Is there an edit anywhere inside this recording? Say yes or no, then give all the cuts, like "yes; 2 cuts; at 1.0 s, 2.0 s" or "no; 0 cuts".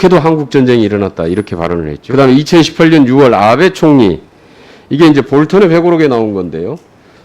yes; 1 cut; at 2.0 s